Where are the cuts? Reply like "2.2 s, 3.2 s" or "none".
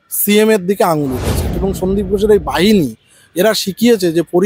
1.6 s